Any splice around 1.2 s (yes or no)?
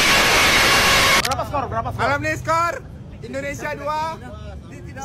yes